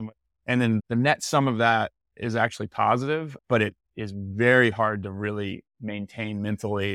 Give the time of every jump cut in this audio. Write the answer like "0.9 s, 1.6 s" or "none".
0.9 s, 3.4 s